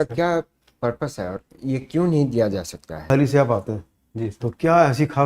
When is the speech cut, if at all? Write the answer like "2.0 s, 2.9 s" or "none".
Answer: 3.1 s

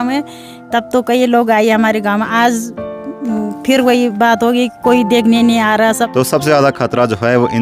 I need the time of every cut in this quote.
6.1 s

